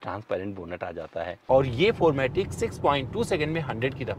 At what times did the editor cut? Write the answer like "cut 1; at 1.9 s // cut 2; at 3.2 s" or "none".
cut 1; at 1.3 s